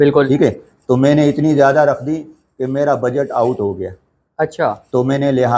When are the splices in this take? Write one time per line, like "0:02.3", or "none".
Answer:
none